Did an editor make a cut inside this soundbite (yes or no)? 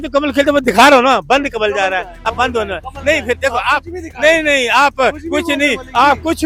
no